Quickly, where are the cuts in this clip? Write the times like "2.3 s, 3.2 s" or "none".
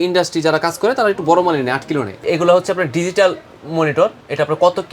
2.1 s